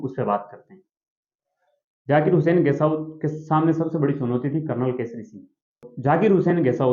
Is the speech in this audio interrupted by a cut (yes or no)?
yes